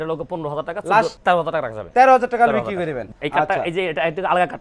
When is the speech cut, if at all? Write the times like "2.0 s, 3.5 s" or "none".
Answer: 1.2 s, 3.1 s